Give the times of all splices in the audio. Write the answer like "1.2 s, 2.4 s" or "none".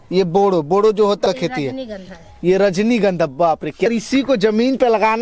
1.3 s, 3.9 s